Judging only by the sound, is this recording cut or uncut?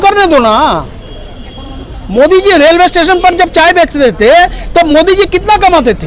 uncut